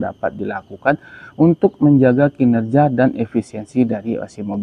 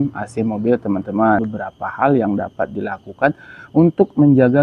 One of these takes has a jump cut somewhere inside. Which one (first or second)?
second